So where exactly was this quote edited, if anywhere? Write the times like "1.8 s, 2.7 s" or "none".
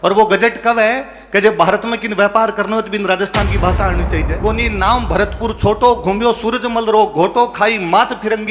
4.4 s